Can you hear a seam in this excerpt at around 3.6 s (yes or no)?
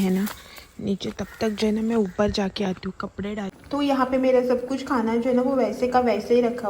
yes